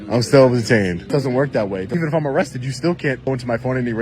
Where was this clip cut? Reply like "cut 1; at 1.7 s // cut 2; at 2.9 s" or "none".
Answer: cut 1; at 1.1 s // cut 2; at 1.9 s // cut 3; at 3.3 s